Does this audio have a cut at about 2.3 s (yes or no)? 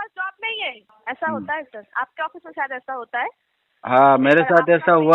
no